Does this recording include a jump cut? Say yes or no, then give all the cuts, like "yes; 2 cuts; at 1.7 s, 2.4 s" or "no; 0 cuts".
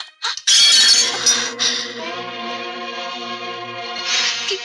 no; 0 cuts